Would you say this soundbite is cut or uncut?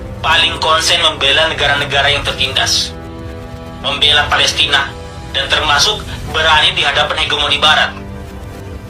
cut